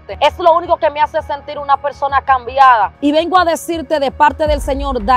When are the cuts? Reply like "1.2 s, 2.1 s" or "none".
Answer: 2.9 s